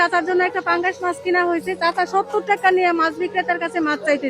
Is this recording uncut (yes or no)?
no